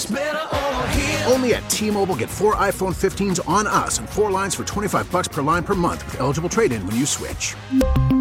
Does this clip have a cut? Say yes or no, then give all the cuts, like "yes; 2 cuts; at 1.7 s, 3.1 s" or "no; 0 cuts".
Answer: no; 0 cuts